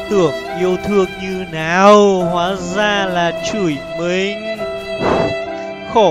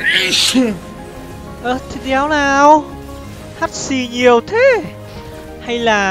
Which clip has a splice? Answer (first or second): second